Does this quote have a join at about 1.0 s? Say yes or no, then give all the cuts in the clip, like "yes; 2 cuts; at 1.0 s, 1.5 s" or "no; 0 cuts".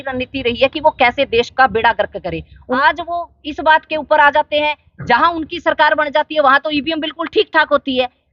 no; 1 cut; at 2.8 s